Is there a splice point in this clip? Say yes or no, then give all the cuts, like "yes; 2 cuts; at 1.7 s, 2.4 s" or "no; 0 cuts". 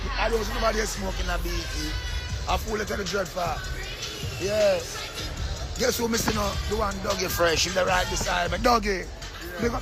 no; 0 cuts